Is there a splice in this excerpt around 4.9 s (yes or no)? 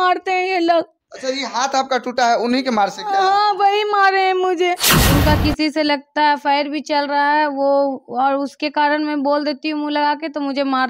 yes